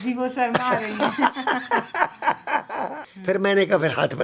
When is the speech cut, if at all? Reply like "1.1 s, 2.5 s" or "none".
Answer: 3.1 s